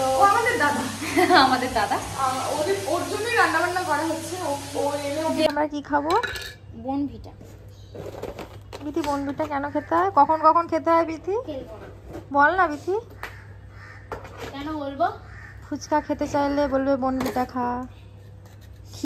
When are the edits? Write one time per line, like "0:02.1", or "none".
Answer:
0:05.5